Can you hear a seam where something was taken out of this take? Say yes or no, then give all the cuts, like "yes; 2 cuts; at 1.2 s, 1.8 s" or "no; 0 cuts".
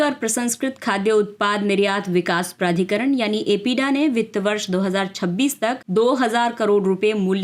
no; 0 cuts